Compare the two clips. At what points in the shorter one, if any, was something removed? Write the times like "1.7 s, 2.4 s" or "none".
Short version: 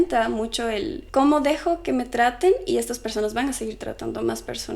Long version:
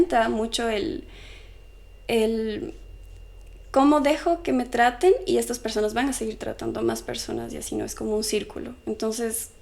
1.0 s